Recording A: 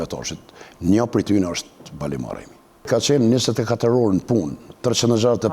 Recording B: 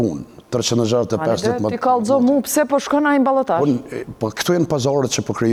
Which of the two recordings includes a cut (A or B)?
A